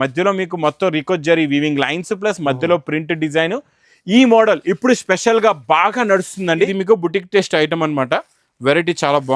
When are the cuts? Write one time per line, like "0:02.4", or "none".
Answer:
0:06.7